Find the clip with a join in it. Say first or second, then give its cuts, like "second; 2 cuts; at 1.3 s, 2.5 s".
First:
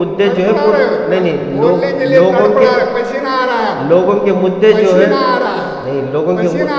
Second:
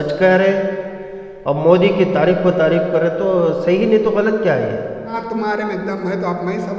second; 1 cut; at 5.2 s